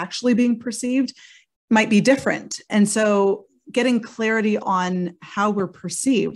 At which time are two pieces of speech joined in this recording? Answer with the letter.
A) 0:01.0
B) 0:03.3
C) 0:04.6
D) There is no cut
C